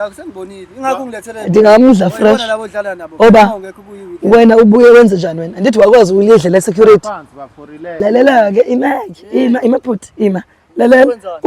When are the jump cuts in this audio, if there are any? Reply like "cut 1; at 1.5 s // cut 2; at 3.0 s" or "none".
cut 1; at 8.0 s

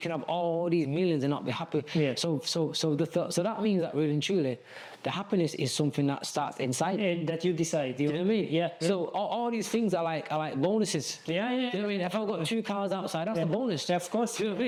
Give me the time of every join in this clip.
none

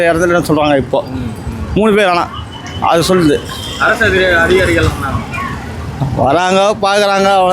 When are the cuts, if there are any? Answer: none

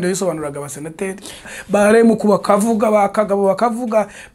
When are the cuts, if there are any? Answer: cut 1; at 1.5 s

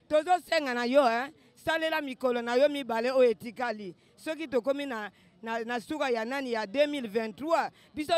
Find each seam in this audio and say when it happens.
none

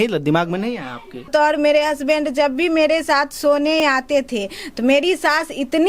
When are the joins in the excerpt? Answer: cut 1; at 1.3 s // cut 2; at 3.8 s

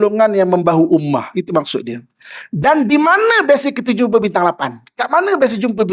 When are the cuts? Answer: none

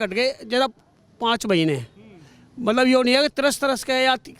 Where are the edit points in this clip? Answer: none

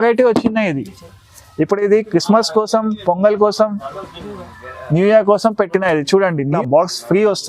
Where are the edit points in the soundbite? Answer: cut 1; at 6.5 s

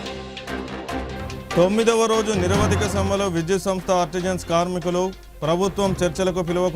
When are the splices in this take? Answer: cut 1; at 1.0 s

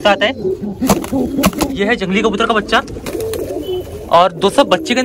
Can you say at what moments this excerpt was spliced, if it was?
cut 1; at 1.8 s

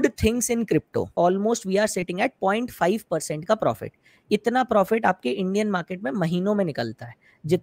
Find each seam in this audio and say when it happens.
cut 1; at 1.1 s

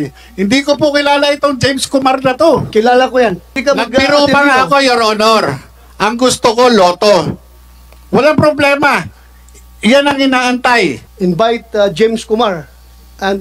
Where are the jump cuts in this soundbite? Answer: cut 1; at 3.5 s // cut 2; at 11.1 s

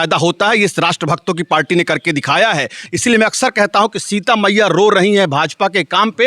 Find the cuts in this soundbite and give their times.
cut 1; at 2.9 s

